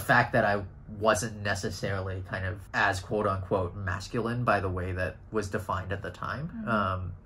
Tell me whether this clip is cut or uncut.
uncut